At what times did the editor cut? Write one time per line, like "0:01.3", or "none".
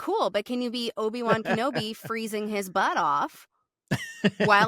none